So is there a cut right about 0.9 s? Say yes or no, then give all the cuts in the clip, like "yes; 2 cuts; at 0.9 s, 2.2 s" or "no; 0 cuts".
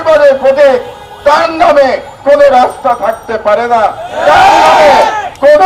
no; 0 cuts